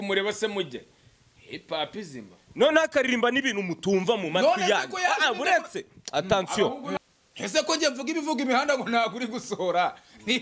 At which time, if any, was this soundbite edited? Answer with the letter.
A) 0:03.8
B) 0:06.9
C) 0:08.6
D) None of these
B